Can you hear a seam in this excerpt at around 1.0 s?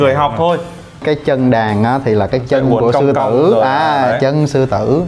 yes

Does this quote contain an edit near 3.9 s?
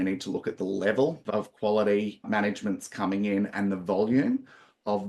no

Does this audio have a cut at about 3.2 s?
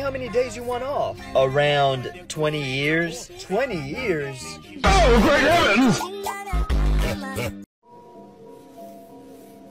no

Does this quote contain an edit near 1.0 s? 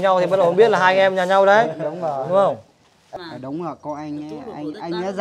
no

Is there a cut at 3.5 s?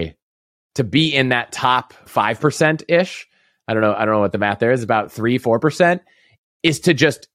no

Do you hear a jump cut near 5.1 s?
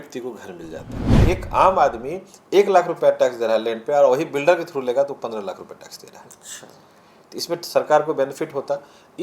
no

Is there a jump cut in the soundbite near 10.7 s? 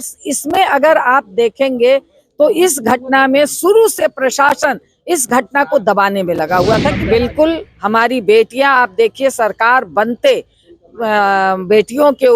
no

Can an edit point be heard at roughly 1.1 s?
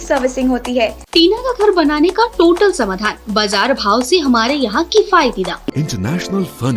yes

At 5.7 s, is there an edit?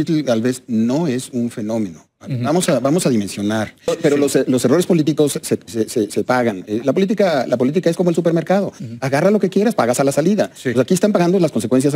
no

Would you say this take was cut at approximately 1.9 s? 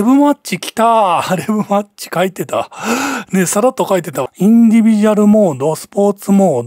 no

